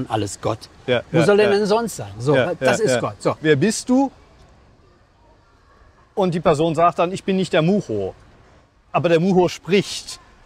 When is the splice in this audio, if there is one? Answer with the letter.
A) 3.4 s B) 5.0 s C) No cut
A